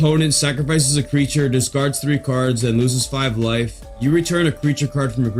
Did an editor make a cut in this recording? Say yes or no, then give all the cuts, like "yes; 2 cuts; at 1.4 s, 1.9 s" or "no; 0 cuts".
no; 0 cuts